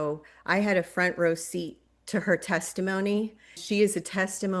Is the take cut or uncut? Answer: cut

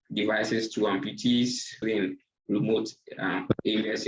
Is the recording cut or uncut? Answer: cut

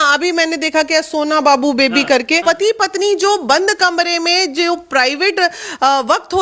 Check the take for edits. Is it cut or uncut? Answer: cut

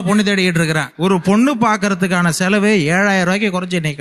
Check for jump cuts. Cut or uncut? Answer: cut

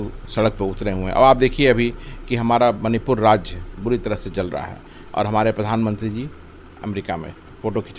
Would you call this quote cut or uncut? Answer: uncut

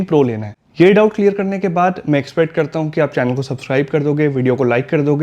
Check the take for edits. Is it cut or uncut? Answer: uncut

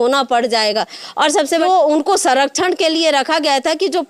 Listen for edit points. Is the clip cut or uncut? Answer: cut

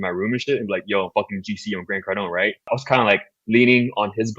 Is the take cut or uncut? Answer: cut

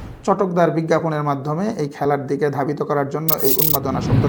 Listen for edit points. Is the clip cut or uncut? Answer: uncut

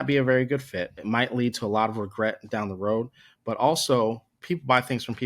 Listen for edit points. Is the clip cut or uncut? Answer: cut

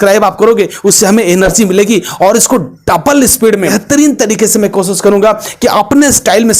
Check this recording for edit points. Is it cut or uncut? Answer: cut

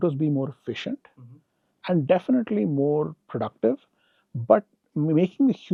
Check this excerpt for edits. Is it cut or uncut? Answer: uncut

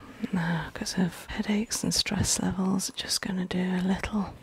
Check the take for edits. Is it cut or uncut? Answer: cut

